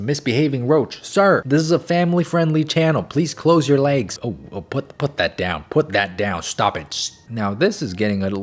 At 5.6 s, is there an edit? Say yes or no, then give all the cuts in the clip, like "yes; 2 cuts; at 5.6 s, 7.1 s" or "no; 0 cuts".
no; 2 cuts; at 4.1 s, 7.2 s